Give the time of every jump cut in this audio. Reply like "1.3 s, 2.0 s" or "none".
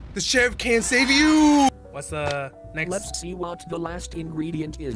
1.8 s